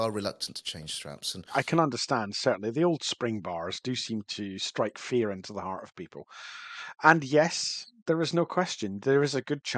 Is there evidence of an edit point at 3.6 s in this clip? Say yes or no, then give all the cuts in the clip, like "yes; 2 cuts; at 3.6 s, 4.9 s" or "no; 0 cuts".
no; 1 cut; at 1.5 s